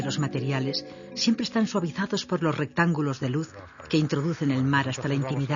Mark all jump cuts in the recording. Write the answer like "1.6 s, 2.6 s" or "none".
none